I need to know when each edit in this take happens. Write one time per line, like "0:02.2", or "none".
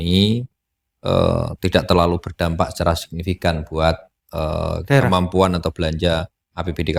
none